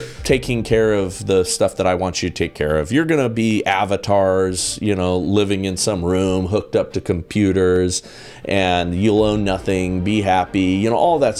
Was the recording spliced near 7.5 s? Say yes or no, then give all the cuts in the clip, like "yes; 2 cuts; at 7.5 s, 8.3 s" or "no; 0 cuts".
no; 0 cuts